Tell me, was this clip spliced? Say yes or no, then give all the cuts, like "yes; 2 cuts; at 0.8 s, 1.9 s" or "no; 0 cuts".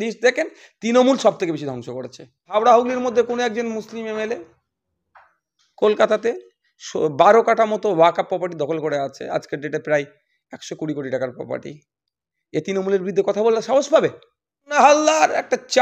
yes; 2 cuts; at 2.5 s, 14.7 s